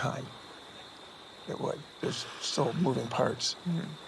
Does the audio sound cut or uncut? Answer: cut